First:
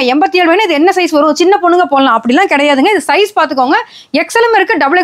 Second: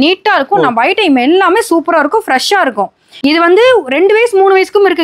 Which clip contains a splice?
second; 1 cut; at 3.0 s

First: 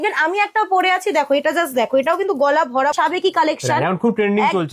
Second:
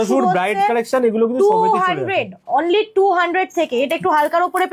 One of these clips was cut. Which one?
first; 1 cut; at 3.0 s

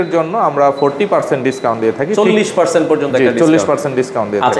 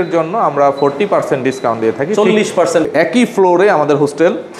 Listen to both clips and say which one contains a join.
second; 1 cut; at 2.9 s

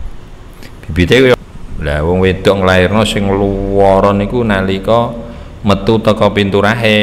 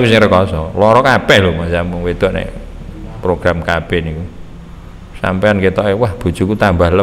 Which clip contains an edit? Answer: first; 1 cut; at 1.3 s

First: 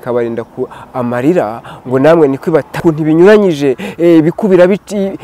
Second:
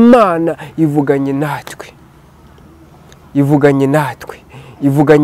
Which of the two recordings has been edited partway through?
first; 1 cut; at 2.8 s

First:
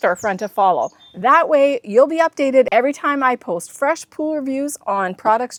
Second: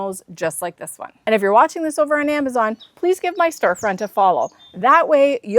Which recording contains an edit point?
second; 1 cut; at 1.1 s

